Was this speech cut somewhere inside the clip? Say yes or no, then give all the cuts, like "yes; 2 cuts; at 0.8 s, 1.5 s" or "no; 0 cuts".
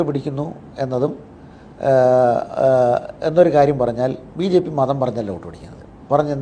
no; 0 cuts